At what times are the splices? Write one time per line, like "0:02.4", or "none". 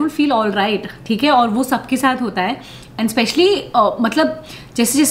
none